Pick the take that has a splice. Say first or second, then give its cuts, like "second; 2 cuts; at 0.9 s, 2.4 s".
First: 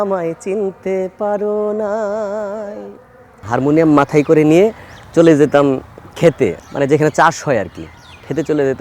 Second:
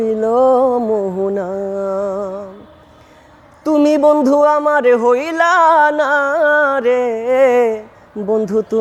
first; 2 cuts; at 3.4 s, 6.6 s